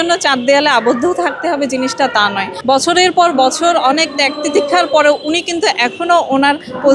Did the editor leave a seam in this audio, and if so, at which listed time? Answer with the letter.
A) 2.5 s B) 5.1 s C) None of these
A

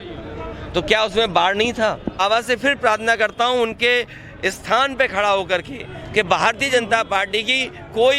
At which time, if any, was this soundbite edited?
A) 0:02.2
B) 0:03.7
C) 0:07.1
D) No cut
A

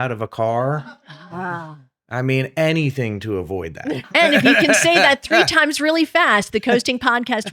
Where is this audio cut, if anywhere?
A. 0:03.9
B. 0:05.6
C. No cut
A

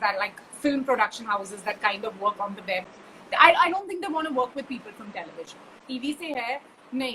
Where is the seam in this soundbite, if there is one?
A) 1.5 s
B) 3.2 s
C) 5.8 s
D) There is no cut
C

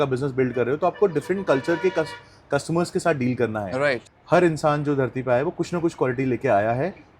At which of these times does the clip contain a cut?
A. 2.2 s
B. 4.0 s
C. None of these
B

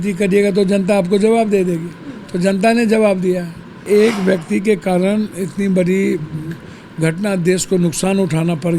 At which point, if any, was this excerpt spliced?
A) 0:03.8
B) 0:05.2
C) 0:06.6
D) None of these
A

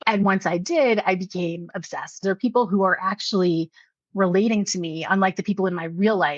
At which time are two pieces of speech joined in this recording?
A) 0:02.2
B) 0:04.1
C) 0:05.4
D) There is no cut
A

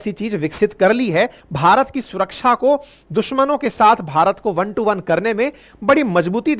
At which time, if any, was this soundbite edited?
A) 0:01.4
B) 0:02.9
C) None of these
A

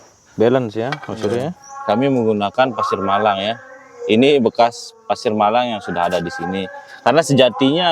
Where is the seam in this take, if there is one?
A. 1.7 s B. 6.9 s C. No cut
A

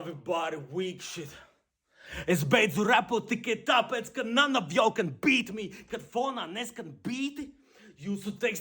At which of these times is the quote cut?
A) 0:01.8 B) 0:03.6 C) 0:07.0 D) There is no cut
A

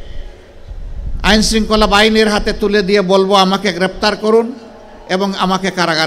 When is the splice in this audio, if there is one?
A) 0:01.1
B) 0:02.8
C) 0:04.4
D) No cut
D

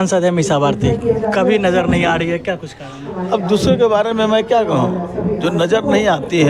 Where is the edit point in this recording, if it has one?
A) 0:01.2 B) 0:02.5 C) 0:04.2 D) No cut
D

